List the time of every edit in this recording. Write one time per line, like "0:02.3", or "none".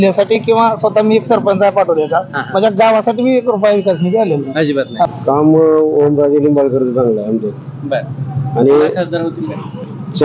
0:05.1